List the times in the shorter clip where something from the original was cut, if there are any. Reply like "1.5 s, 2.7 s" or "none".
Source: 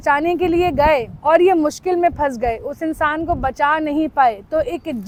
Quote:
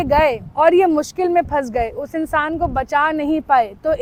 none